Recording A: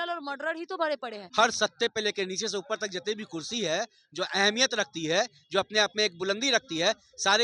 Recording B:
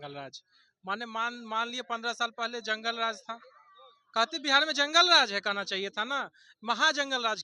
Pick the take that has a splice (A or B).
A